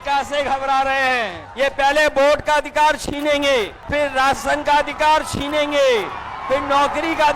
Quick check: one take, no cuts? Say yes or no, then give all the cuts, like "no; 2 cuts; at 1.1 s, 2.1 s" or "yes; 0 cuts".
no; 2 cuts; at 1.4 s, 3.8 s